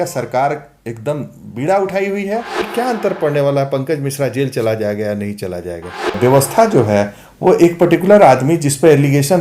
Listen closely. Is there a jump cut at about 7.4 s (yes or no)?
no